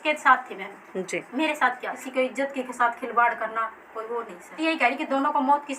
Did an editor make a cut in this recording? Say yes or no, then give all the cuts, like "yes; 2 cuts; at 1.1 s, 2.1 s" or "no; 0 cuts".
yes; 2 cuts; at 2.0 s, 4.6 s